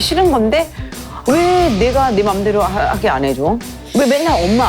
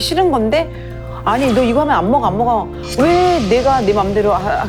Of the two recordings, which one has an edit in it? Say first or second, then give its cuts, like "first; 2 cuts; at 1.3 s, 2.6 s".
first; 1 cut; at 1.1 s